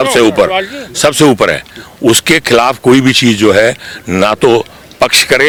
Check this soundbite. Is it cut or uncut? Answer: uncut